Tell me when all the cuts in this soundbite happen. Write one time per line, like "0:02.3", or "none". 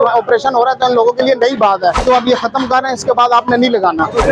0:02.0